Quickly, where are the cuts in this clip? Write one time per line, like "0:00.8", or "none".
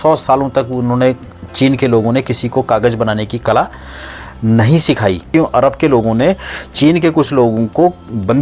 0:05.3